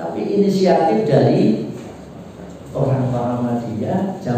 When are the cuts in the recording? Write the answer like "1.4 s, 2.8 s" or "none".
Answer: none